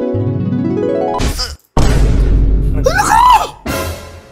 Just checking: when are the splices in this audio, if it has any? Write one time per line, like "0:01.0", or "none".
0:01.2